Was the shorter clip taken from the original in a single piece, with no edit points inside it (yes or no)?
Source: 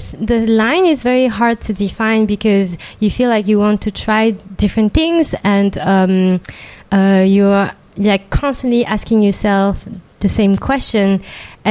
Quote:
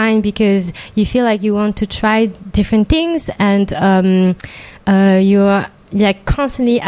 yes